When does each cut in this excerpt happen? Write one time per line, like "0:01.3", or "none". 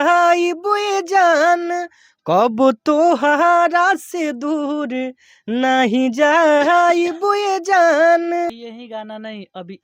0:08.6